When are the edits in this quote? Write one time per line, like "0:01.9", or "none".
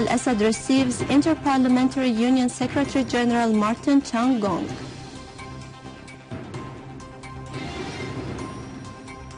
none